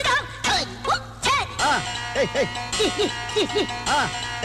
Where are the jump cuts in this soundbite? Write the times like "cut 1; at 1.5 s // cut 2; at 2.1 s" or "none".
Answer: none